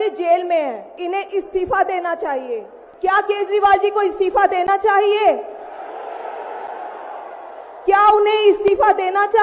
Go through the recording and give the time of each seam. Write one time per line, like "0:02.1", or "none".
0:00.9
0:02.8

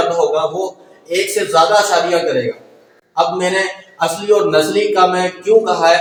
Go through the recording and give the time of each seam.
none

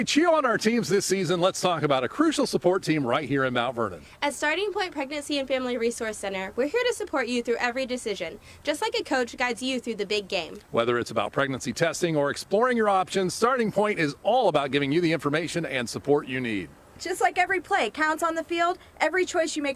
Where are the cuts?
0:02.6

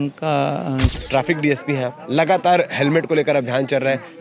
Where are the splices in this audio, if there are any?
0:00.9

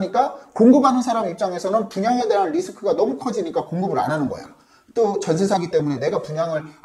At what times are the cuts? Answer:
none

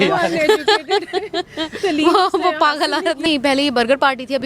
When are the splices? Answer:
0:03.3

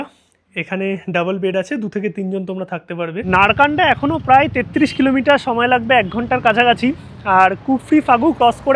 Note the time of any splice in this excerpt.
0:03.2

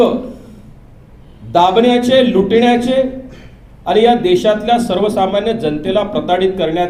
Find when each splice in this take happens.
none

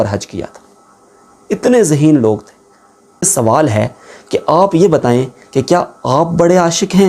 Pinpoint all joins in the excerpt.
0:03.3

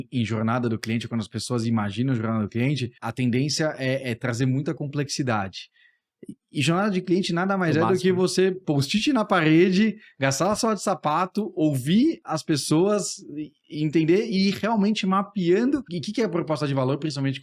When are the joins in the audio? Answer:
0:03.0
0:08.6
0:16.0

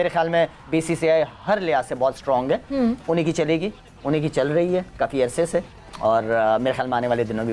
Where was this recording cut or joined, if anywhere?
none

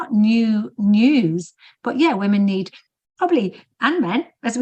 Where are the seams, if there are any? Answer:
none

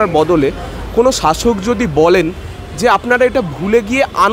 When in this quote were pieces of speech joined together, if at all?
none

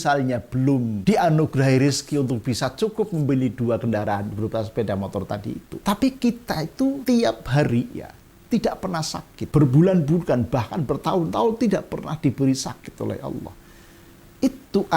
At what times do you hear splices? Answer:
0:01.0
0:05.7
0:07.0
0:09.4

